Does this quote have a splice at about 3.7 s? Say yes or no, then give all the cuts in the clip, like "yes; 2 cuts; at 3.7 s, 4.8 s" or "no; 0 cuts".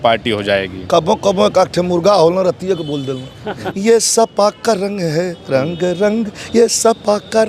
yes; 1 cut; at 3.7 s